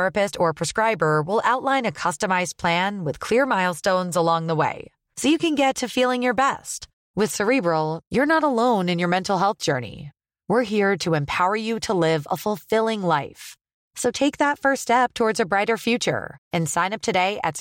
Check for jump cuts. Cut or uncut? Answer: uncut